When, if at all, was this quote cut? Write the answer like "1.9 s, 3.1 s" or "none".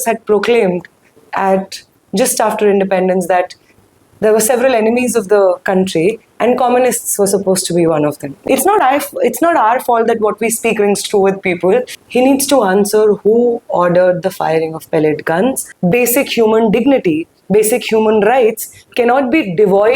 8.3 s, 12.0 s, 15.7 s